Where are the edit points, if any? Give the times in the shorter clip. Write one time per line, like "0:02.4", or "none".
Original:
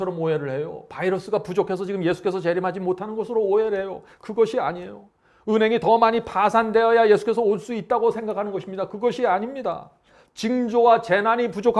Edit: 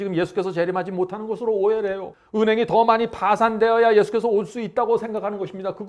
0:02.1

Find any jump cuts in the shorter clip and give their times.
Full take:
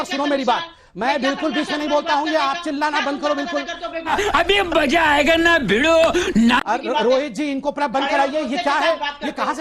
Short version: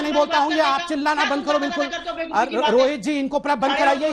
0:02.3

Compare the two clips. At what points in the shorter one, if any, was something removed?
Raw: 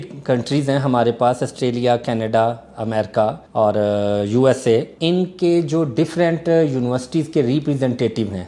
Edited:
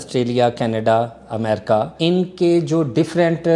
0:01.9

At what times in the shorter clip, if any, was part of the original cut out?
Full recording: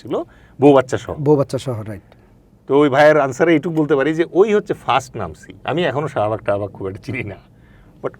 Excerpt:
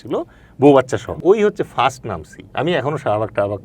0:01.2

